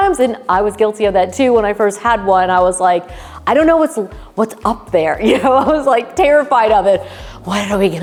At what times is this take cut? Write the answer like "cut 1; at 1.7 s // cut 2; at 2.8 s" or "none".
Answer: none

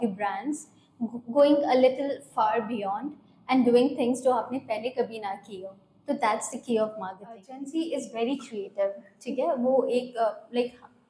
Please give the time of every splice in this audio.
cut 1; at 7.5 s

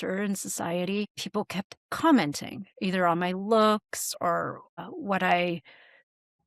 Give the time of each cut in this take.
none

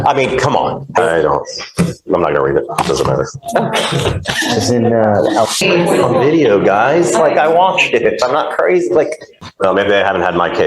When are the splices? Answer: cut 1; at 1.0 s // cut 2; at 5.6 s // cut 3; at 9.4 s

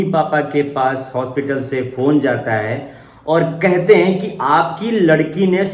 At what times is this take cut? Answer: none

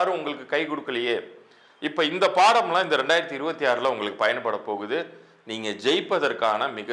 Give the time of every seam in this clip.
none

